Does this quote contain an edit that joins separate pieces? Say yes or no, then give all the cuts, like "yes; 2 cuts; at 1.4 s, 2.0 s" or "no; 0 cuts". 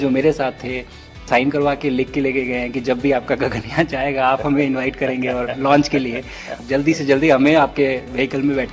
yes; 2 cuts; at 1.2 s, 6.6 s